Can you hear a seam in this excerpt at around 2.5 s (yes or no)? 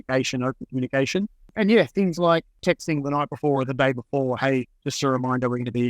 yes